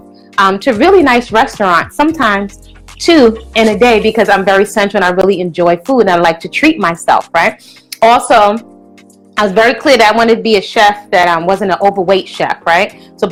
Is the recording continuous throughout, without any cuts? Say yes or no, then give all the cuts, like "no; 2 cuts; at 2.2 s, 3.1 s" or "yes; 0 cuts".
yes; 0 cuts